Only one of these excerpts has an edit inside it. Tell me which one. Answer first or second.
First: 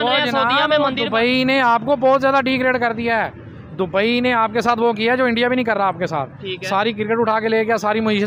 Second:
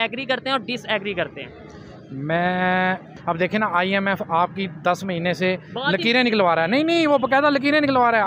second